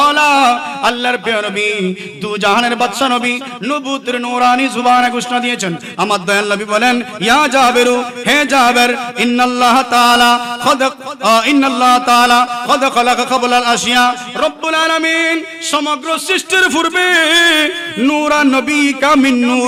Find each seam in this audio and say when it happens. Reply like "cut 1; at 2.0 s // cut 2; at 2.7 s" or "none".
none